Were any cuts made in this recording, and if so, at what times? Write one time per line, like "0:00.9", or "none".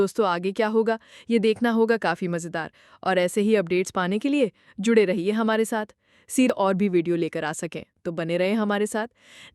0:06.5